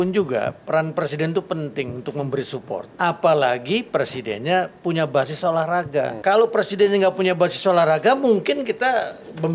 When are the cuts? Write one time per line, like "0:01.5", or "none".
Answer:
0:02.9
0:06.1